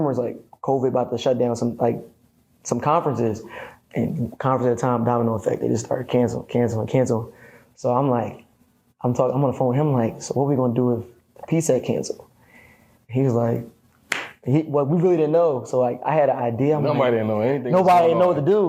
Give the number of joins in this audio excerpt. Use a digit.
0